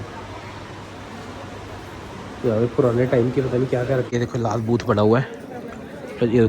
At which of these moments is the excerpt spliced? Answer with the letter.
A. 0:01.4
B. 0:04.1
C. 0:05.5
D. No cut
B